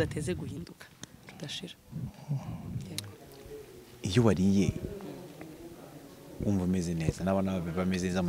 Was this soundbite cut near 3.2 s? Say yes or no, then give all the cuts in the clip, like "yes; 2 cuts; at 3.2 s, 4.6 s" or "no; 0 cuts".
yes; 1 cut; at 3.2 s